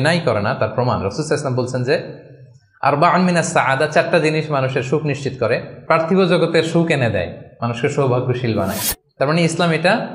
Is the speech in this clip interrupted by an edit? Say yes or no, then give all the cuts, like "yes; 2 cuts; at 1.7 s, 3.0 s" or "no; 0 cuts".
yes; 1 cut; at 5.7 s